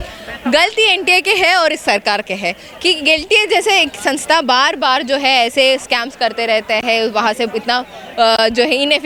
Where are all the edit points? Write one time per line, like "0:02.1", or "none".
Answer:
none